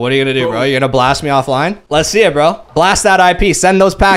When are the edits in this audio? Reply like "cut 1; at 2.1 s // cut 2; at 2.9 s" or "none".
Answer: cut 1; at 1.8 s